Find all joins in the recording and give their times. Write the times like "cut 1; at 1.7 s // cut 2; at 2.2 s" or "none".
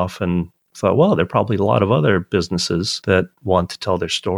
cut 1; at 2.9 s